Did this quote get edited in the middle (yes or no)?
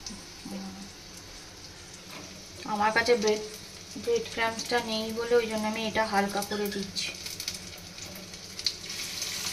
no